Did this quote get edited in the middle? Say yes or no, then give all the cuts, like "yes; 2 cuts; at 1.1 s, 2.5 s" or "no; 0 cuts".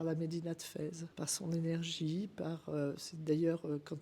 yes; 1 cut; at 1.1 s